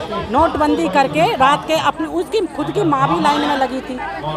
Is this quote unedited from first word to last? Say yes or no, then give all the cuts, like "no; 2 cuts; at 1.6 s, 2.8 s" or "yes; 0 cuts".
yes; 0 cuts